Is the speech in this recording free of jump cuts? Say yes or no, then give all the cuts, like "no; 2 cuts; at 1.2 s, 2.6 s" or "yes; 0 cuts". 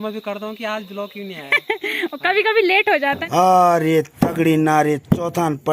no; 1 cut; at 3.2 s